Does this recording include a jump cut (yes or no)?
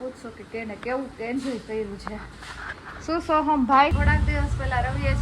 yes